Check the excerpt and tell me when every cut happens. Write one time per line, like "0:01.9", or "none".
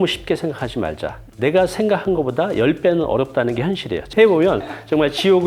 0:04.1